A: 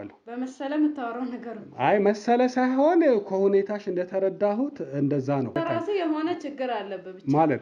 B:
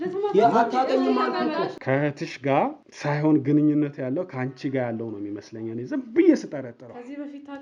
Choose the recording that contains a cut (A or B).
B